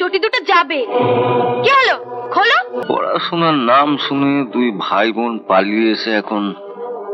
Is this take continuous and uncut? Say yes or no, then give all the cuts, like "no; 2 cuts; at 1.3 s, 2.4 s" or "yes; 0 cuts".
no; 1 cut; at 2.8 s